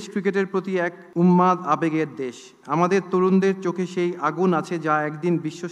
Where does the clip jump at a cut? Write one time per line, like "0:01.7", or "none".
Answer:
0:01.0